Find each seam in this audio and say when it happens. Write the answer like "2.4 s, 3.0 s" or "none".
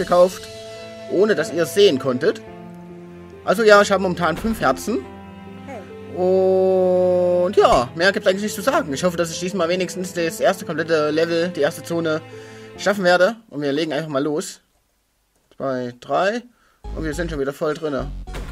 12.4 s